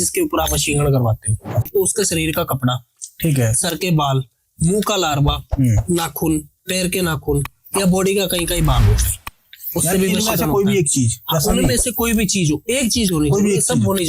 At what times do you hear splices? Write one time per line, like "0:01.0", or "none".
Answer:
0:01.7